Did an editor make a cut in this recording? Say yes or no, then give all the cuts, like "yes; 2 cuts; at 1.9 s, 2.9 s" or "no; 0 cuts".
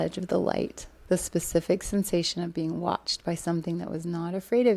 no; 0 cuts